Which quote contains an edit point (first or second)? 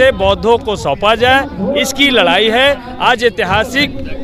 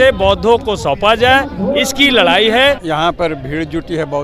second